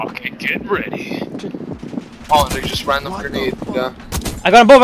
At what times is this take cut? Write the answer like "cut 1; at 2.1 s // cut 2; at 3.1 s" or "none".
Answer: cut 1; at 1.4 s